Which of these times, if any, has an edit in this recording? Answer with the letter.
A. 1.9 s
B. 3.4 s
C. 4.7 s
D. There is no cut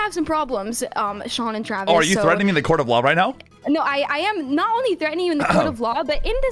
D